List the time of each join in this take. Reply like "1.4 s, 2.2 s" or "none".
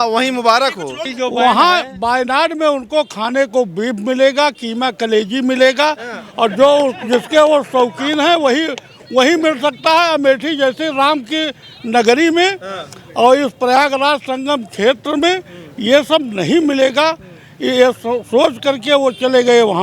1.0 s